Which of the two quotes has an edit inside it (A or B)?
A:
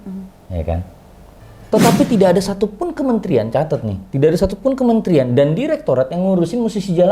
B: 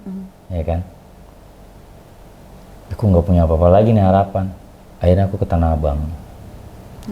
A